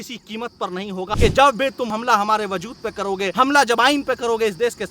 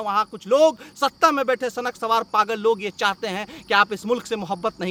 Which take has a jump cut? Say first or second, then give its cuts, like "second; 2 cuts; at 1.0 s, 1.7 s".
first; 3 cuts; at 1.1 s, 1.9 s, 3.3 s